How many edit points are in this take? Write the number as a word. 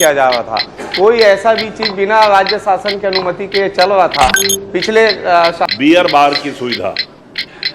one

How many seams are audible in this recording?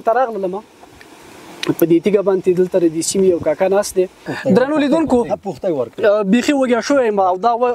one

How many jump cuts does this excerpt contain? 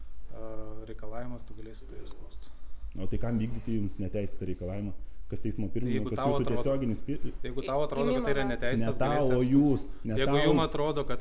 zero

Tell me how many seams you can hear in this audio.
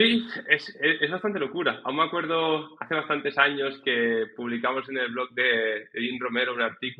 zero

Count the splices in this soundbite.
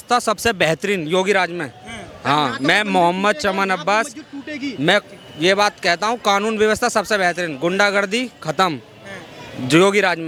zero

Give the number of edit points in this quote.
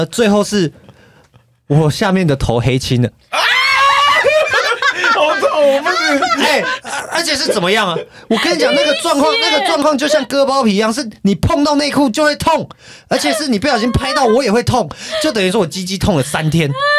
two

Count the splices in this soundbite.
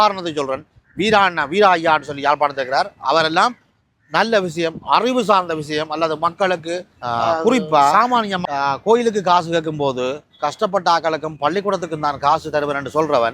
one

